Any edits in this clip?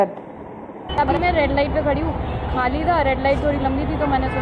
yes; 1 cut; at 1.0 s

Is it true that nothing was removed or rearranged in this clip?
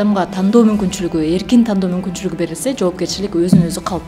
yes; 0 cuts

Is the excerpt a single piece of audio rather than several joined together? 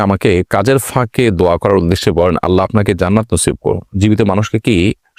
yes; 0 cuts

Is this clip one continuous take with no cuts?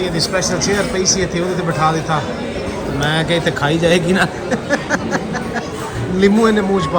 yes; 0 cuts

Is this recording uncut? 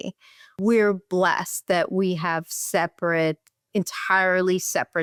yes; 0 cuts

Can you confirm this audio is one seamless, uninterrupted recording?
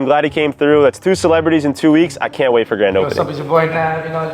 no; 1 cut; at 3.1 s

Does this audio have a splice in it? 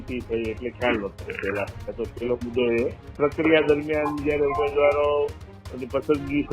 yes; 1 cut; at 3.0 s

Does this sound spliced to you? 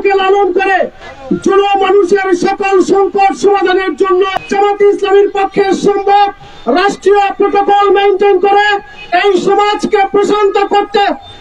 yes; 1 cut; at 4.4 s

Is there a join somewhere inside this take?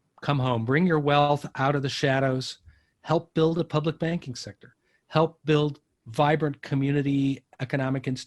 no; 0 cuts

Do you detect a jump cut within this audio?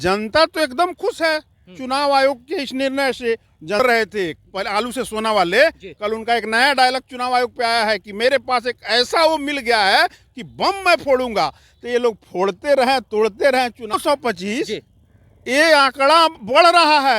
yes; 2 cuts; at 3.8 s, 13.9 s

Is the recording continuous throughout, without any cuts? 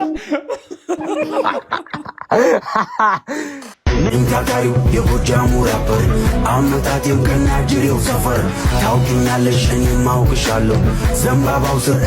no; 1 cut; at 3.7 s

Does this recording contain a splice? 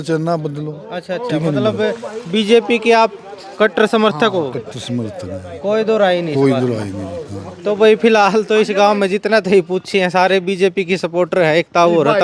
no; 0 cuts

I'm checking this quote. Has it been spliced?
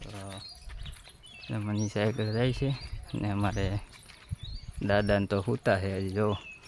no; 0 cuts

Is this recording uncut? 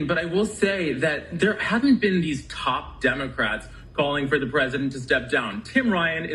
yes; 0 cuts

